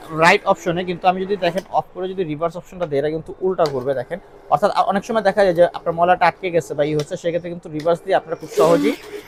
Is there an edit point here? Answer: no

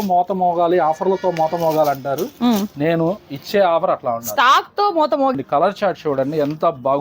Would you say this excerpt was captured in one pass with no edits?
no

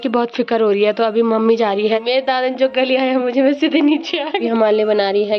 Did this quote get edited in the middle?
yes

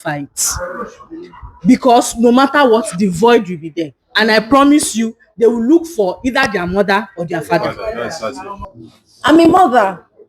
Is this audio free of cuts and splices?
no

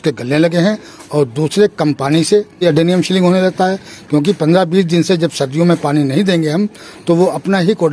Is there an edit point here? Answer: yes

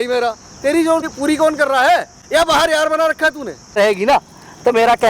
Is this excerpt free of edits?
no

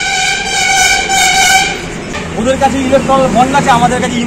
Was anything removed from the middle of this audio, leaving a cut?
yes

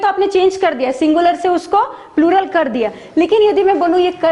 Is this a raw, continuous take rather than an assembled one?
yes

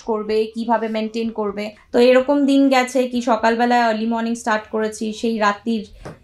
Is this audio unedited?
no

